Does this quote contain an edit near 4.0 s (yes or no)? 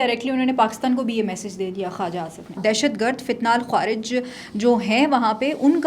no